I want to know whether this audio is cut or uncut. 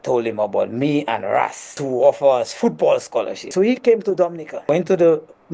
cut